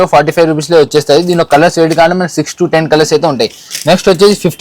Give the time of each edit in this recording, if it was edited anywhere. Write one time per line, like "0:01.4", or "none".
none